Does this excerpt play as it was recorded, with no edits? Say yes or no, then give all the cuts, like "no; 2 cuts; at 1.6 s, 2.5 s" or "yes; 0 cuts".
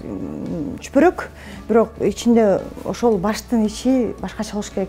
yes; 0 cuts